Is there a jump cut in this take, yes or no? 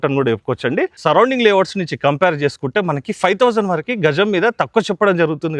yes